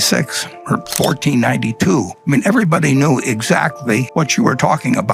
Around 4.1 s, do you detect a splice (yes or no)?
yes